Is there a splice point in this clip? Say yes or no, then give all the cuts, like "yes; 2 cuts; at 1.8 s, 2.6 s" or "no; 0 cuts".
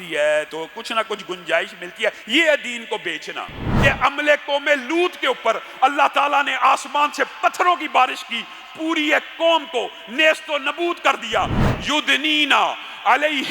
yes; 2 cuts; at 3.6 s, 11.6 s